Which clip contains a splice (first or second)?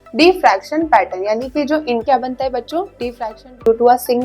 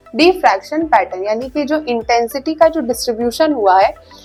first